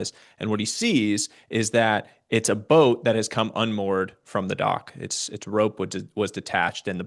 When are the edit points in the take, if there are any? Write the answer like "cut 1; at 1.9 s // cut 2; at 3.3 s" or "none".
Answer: none